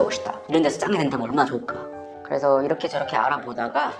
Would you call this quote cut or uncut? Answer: uncut